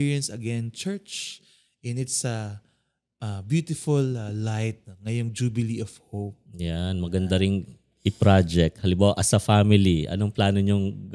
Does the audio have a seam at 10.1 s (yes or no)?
no